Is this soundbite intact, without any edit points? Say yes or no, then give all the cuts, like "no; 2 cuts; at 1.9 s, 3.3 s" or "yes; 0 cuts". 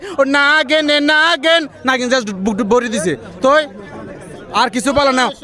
yes; 0 cuts